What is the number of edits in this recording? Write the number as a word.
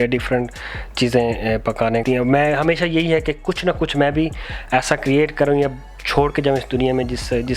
one